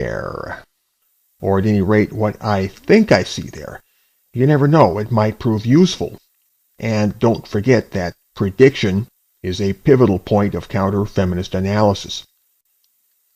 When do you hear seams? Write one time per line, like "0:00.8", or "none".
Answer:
0:02.3